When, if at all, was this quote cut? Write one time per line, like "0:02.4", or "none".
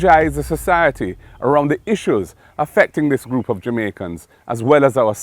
none